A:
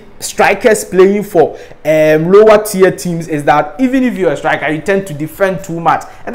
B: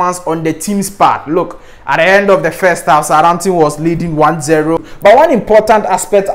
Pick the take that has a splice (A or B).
B